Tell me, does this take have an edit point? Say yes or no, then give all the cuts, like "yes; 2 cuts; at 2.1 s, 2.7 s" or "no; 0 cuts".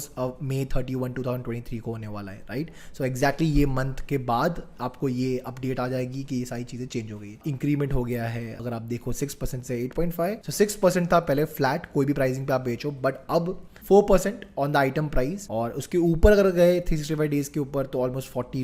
yes; 3 cuts; at 7.4 s, 10.4 s, 15.4 s